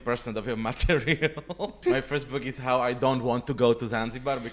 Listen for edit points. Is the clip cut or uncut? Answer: cut